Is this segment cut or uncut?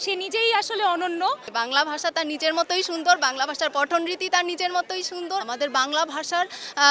cut